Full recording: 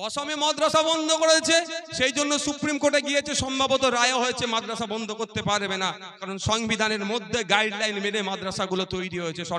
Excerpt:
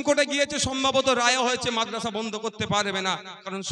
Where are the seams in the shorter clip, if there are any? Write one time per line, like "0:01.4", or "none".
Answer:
none